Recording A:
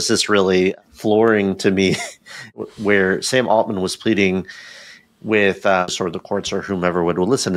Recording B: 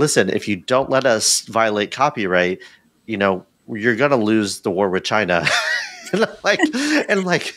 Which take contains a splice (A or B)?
A